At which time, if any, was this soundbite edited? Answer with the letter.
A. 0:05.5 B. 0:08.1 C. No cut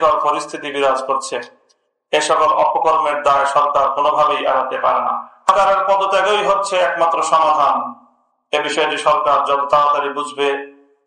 A